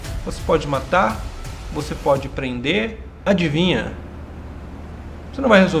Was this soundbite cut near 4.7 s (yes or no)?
no